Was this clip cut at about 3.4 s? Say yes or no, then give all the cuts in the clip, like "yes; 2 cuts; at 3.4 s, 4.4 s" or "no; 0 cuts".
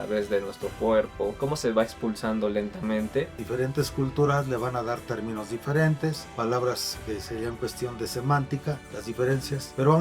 yes; 4 cuts; at 1.3 s, 3.4 s, 6.3 s, 9.2 s